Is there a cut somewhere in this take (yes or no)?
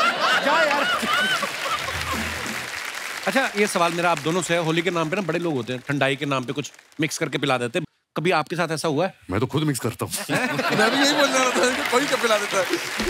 yes